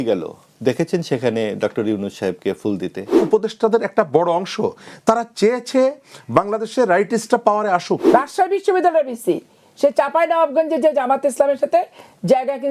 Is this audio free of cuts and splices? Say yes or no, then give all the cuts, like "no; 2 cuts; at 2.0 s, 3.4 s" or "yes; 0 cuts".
no; 2 cuts; at 3.1 s, 8.0 s